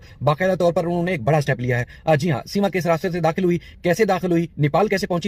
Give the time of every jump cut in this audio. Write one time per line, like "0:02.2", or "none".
none